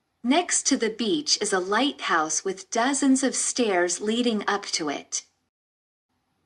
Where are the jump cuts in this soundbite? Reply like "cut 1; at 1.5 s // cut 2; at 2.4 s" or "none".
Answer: cut 1; at 4.7 s